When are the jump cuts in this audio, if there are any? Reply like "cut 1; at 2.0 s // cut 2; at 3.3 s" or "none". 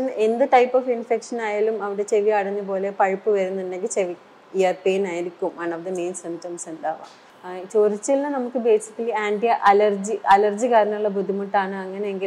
none

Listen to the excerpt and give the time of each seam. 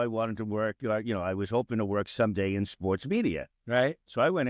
none

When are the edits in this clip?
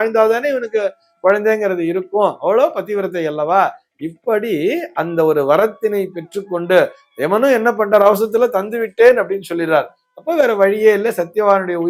none

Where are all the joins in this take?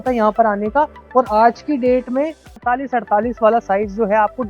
cut 1; at 2.6 s

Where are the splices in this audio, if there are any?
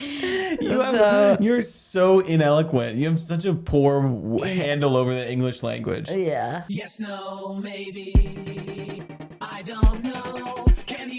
cut 1; at 6.6 s

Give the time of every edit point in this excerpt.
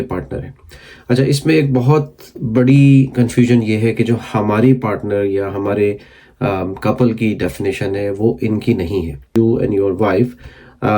cut 1; at 9.3 s

